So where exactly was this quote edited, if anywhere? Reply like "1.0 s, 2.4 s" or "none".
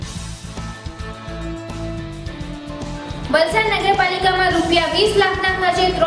1.9 s